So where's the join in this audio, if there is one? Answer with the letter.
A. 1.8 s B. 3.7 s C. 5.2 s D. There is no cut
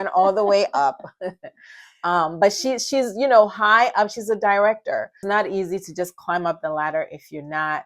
C